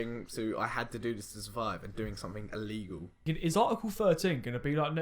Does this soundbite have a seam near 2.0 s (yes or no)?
no